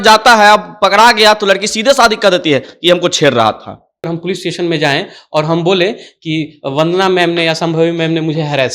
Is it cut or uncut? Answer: cut